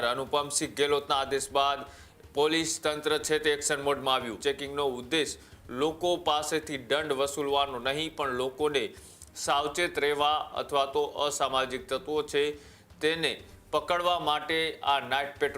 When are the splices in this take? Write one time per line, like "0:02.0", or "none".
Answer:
0:04.3